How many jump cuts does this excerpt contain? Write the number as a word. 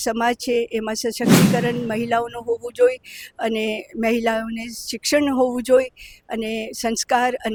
zero